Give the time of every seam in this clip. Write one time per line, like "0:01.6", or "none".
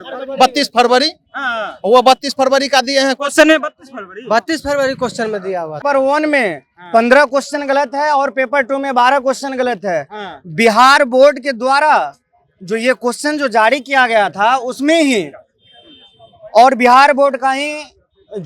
0:05.8